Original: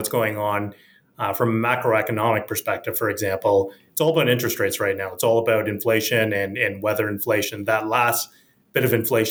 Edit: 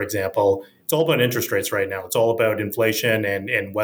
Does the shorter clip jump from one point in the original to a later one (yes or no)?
no